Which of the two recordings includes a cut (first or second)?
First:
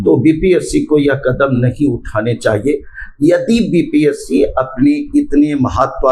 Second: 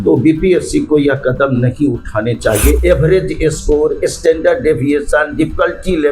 second